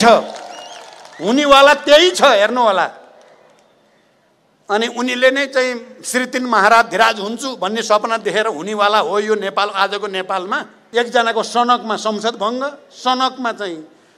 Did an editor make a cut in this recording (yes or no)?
yes